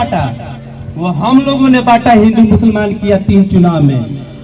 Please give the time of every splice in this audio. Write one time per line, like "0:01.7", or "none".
none